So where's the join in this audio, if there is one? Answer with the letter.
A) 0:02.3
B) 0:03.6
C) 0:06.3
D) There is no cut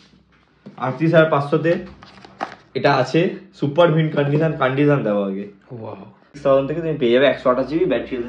C